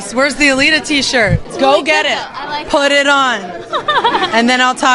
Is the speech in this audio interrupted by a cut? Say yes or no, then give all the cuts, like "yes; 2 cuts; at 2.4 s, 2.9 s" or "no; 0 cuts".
yes; 1 cut; at 1.5 s